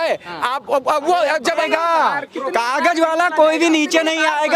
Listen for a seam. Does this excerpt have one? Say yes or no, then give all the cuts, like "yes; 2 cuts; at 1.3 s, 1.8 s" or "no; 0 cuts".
yes; 1 cut; at 1.6 s